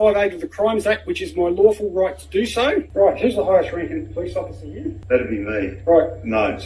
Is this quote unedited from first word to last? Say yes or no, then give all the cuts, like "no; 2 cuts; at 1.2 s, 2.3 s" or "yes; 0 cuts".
no; 2 cuts; at 2.9 s, 5.0 s